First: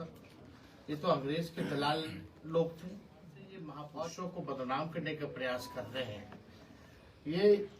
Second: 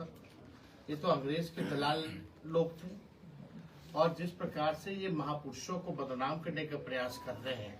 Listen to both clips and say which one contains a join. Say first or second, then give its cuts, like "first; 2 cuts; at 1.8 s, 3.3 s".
first; 1 cut; at 3.8 s